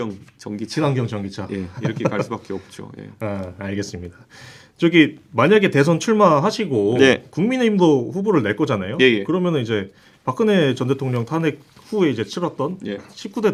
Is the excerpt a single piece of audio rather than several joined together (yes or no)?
yes